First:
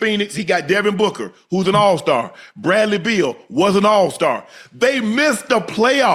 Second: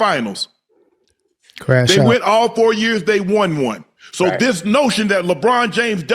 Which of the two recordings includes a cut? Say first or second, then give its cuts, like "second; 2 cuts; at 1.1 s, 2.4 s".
second; 1 cut; at 4.0 s